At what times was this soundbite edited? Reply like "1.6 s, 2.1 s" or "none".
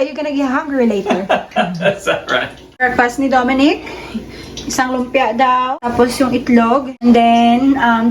2.8 s, 5.8 s, 7.0 s